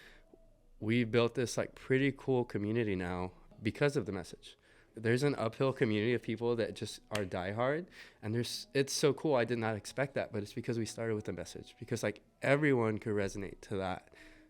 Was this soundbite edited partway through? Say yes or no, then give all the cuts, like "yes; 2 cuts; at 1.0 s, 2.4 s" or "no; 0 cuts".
yes; 1 cut; at 4.9 s